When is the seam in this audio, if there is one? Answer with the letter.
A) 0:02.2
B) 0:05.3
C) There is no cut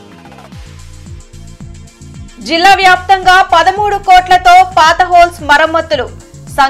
A